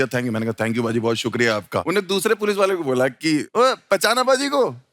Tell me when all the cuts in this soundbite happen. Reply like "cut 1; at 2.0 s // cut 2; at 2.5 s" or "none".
cut 1; at 1.8 s // cut 2; at 3.5 s